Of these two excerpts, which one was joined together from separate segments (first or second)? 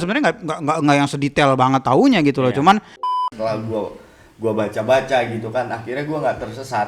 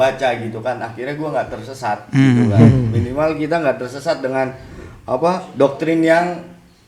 first